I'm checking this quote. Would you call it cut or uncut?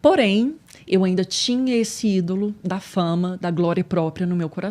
uncut